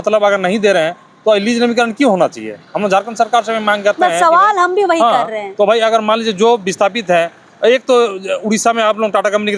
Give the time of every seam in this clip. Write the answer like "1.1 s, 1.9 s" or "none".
none